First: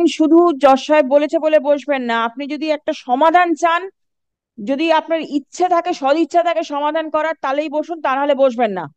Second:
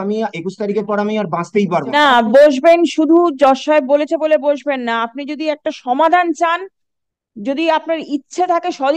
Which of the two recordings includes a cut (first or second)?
second